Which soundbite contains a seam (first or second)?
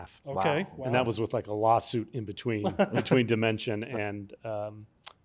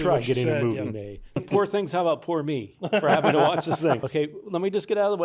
second